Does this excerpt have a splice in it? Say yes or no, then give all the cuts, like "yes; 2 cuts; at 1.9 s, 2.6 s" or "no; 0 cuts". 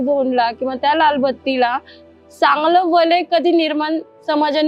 no; 0 cuts